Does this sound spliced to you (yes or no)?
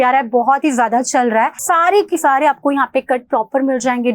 yes